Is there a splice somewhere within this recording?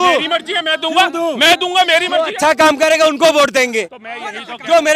no; 0 cuts

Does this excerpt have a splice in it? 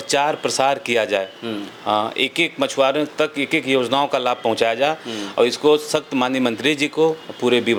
no; 0 cuts

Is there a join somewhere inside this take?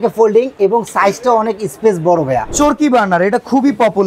yes; 1 cut; at 2.5 s

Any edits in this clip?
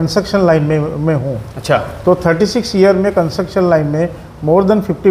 no; 0 cuts

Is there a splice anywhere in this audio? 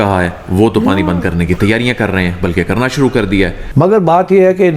yes; 1 cut; at 3.6 s

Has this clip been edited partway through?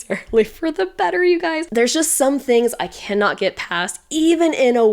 yes; 1 cut; at 1.7 s

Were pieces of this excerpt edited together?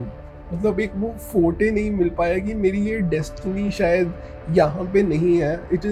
no; 0 cuts

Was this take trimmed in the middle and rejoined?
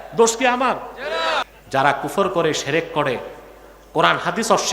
yes; 1 cut; at 1.5 s

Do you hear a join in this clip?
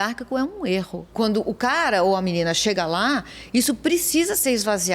yes; 1 cut; at 1.0 s

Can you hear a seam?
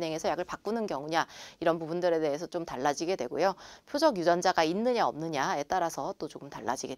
no; 0 cuts

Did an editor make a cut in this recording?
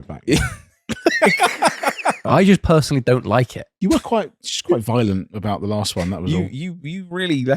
yes; 1 cut; at 2.2 s

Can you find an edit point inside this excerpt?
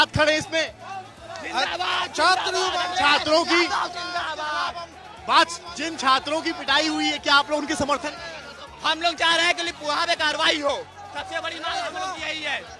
no; 0 cuts

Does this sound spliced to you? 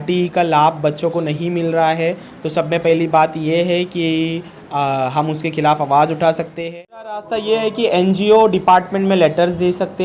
yes; 1 cut; at 7.3 s

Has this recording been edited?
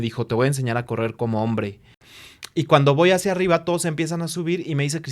yes; 1 cut; at 2.1 s

